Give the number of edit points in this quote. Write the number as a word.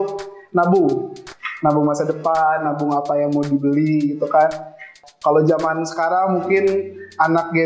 one